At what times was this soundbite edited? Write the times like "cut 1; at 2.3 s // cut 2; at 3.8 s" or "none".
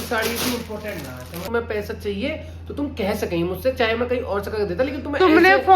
cut 1; at 1.5 s